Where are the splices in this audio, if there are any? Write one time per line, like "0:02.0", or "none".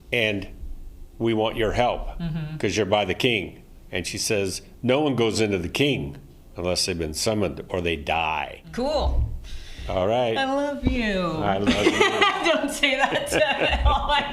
0:08.7